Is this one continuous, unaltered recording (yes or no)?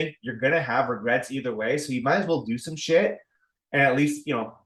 yes